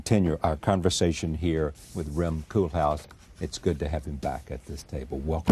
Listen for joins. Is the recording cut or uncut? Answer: cut